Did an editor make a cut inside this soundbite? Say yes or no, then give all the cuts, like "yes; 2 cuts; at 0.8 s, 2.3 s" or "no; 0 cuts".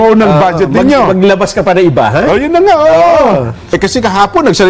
yes; 1 cut; at 3.7 s